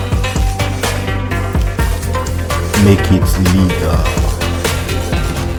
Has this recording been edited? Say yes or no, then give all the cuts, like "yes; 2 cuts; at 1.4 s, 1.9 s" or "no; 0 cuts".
no; 0 cuts